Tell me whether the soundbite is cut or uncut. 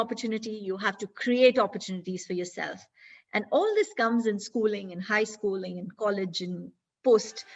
uncut